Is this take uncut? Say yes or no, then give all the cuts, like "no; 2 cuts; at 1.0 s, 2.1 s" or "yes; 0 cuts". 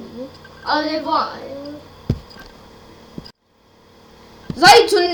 yes; 0 cuts